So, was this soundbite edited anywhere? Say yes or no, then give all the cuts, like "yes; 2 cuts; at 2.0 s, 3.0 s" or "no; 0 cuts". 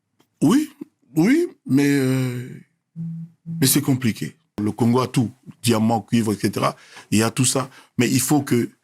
yes; 1 cut; at 4.6 s